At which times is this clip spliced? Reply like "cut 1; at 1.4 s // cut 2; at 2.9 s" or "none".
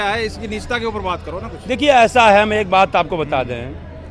none